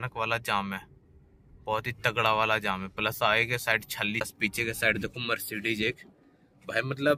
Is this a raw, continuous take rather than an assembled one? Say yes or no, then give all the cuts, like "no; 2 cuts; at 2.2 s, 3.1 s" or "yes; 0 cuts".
no; 1 cut; at 4.2 s